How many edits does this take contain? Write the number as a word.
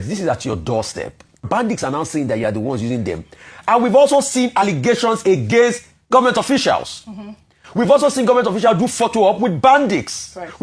one